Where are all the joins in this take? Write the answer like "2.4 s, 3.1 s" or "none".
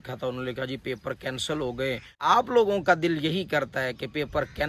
2.2 s